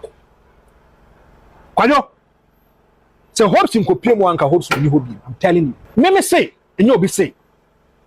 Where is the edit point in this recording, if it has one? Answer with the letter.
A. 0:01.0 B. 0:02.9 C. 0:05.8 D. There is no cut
C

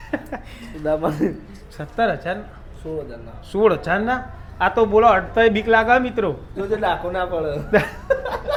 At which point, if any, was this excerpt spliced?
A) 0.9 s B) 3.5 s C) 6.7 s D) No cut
D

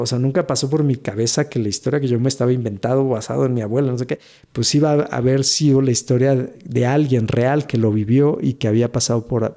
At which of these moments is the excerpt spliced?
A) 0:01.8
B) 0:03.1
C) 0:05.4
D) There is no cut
D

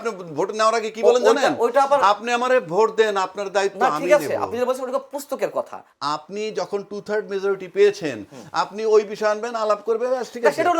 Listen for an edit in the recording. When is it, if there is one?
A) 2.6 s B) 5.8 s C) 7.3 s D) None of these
B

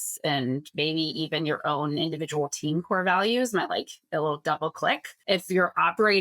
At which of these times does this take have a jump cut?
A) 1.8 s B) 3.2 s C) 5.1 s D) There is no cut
C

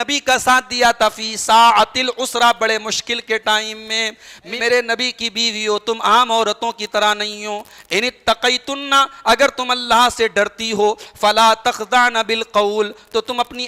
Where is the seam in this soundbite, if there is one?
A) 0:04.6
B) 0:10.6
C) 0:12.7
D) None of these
A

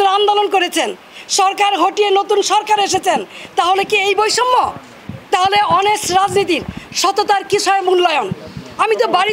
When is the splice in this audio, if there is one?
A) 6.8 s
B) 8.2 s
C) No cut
C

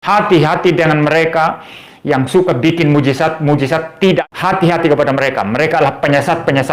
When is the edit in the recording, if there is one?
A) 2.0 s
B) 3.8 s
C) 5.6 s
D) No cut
B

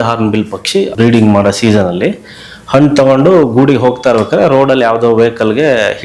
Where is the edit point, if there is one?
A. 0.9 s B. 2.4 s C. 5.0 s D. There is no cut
A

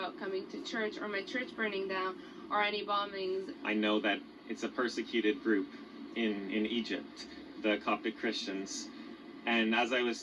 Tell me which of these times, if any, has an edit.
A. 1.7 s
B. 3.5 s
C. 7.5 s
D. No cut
B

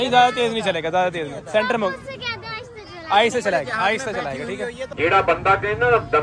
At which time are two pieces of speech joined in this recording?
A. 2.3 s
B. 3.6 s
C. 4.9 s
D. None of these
C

